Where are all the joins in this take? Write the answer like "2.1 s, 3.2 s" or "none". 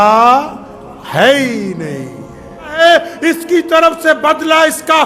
2.8 s